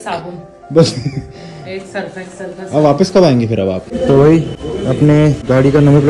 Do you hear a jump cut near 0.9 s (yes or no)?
no